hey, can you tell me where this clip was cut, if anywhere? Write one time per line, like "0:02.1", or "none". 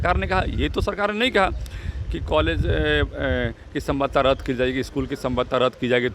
none